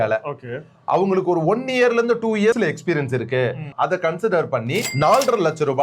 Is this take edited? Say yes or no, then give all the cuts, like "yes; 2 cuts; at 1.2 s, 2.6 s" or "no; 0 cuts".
yes; 2 cuts; at 2.6 s, 3.7 s